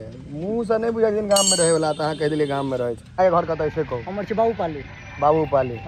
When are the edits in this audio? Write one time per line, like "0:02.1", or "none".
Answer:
0:03.0